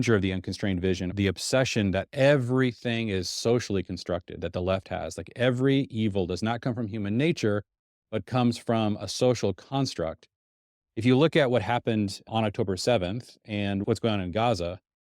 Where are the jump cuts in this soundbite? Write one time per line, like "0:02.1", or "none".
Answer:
0:01.1